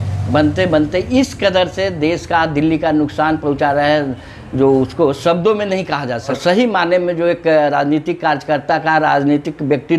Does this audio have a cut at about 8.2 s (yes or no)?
no